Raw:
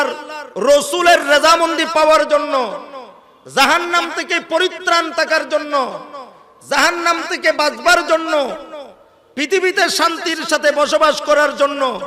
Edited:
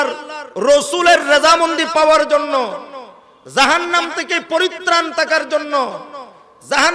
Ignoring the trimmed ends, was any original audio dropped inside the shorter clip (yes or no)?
no